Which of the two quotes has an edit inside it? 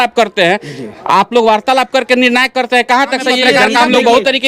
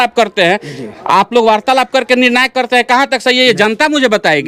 first; 1 cut; at 3.4 s

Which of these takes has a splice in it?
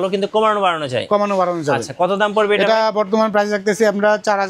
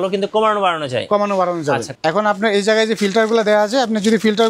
second; 1 cut; at 1.9 s

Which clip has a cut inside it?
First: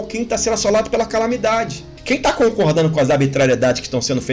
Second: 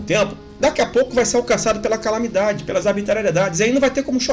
first; 1 cut; at 1.9 s

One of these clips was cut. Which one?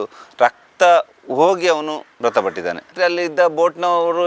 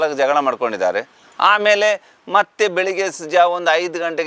first; 1 cut; at 2.9 s

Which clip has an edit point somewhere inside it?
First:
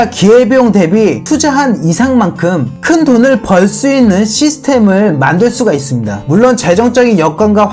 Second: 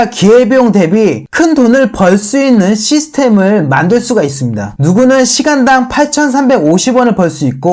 second; 2 cuts; at 1.2 s, 4.7 s

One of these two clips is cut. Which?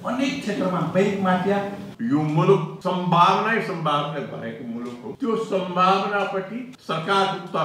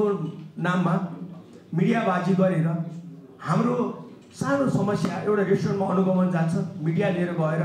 first; 4 cuts; at 1.8 s, 2.7 s, 5.1 s, 6.7 s

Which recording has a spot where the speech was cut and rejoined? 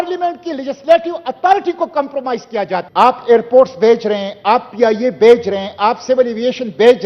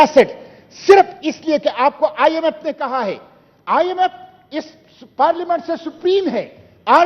first; 1 cut; at 2.9 s

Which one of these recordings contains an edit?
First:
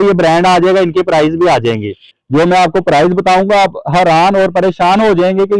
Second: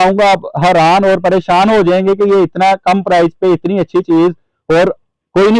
first; 1 cut; at 2.1 s

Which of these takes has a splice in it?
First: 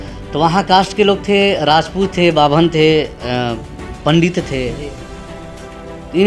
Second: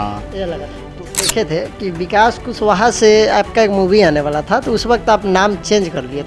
second; 1 cut; at 1.1 s

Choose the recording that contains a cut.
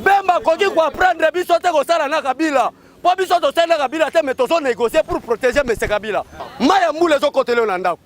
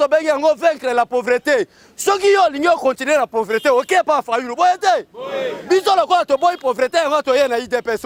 first; 1 cut; at 6.4 s

